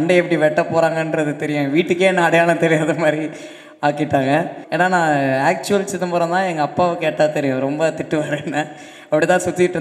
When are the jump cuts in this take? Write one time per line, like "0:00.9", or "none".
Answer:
0:04.6

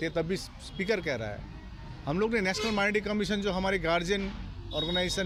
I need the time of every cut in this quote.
none

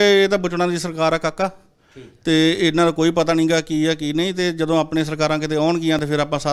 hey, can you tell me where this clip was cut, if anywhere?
none

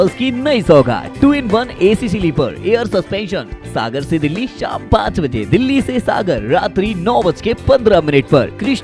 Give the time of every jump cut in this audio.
none

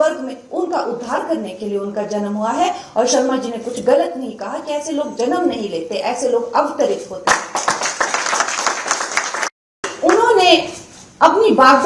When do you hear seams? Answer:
0:09.9

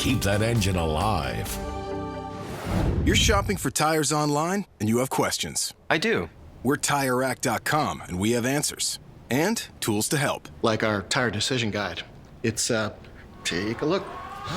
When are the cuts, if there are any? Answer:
0:02.8

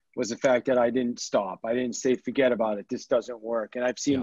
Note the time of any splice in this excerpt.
none

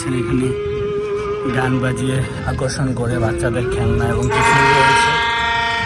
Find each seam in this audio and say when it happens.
none

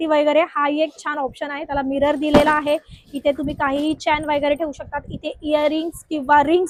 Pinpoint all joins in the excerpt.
none

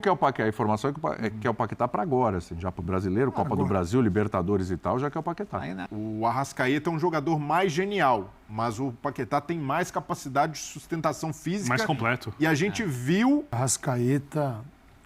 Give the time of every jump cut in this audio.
0:05.8
0:13.5

